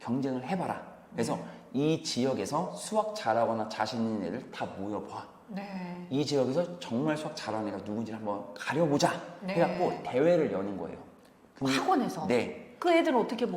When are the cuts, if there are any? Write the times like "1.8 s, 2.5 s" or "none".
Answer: none